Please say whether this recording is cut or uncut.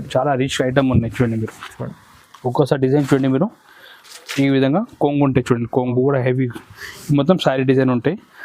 uncut